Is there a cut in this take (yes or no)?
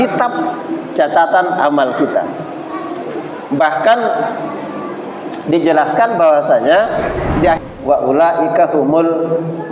yes